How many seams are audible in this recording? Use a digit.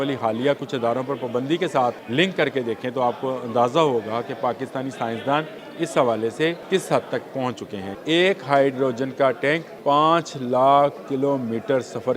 5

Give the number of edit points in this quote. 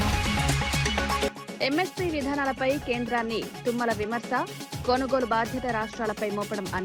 1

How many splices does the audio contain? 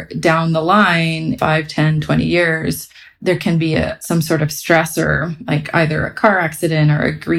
3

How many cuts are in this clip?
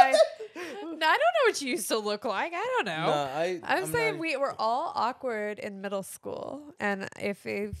0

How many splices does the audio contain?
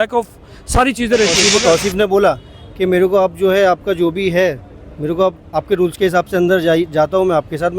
1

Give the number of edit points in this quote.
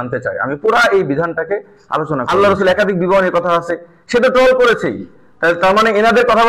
1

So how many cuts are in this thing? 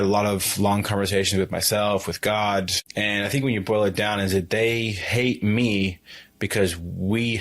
1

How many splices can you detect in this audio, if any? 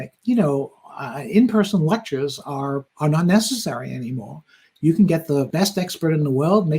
1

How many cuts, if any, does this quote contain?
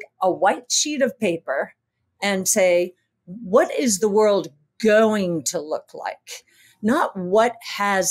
0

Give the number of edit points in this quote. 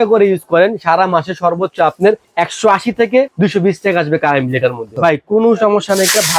3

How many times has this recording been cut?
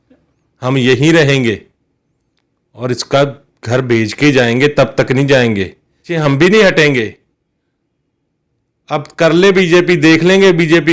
1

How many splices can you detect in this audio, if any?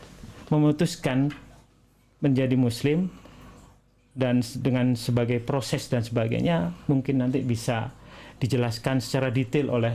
0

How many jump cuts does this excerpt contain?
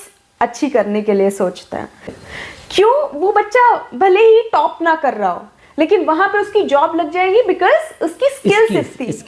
1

